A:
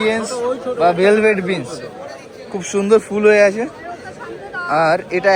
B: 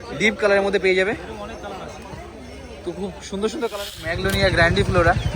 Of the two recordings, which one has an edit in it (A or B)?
B